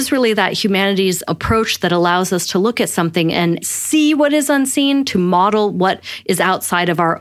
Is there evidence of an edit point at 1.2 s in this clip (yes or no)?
yes